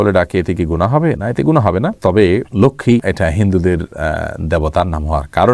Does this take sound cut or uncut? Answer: uncut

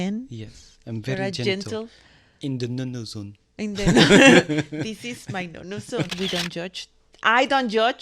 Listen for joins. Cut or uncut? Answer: cut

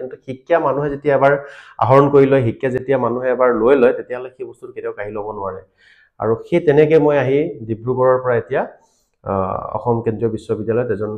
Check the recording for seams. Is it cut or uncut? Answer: uncut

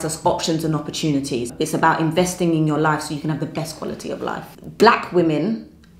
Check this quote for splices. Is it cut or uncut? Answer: cut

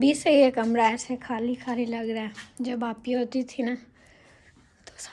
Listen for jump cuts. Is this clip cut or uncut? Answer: uncut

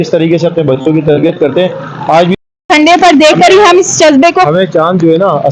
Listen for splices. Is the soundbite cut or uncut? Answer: cut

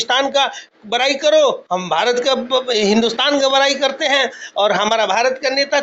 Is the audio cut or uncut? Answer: uncut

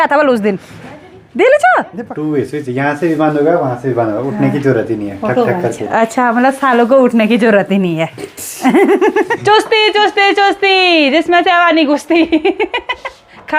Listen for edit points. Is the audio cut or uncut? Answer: cut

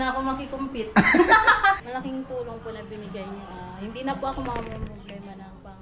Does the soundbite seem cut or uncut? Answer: cut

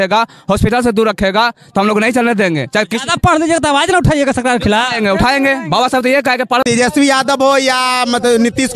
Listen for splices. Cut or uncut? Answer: cut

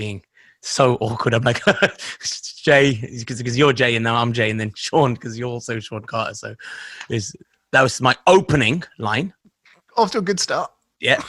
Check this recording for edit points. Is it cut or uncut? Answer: uncut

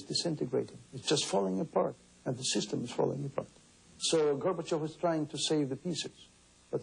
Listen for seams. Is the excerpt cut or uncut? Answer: uncut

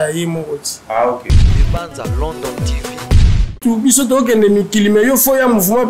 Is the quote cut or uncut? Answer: cut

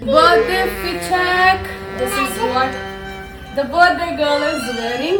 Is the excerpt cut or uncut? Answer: uncut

